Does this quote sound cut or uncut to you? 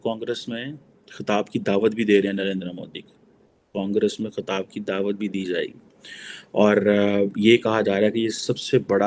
uncut